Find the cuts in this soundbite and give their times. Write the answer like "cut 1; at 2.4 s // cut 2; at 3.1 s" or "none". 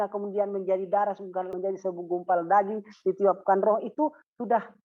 cut 1; at 1.5 s